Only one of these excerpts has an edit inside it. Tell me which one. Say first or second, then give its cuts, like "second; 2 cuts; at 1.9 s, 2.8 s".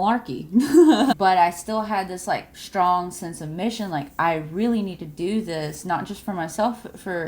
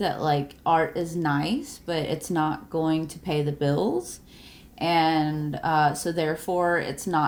first; 1 cut; at 1.2 s